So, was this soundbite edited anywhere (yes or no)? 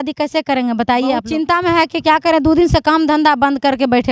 yes